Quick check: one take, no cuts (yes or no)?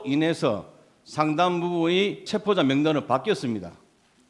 no